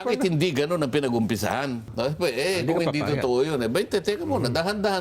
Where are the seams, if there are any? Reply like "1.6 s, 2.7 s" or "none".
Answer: 1.9 s